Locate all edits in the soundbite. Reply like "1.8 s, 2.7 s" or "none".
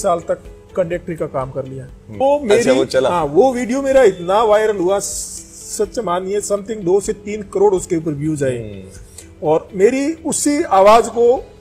2.1 s